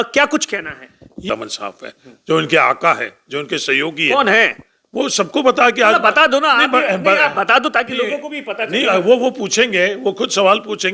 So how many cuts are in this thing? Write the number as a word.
one